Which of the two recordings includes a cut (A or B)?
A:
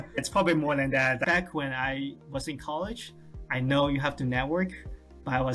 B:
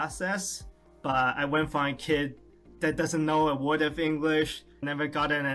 A